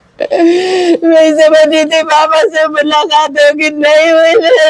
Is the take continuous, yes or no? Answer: yes